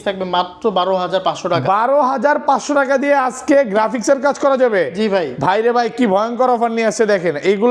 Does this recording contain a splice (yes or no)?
no